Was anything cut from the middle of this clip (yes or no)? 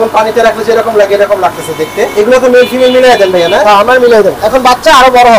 yes